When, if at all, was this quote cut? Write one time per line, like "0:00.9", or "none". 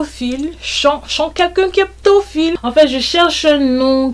0:02.6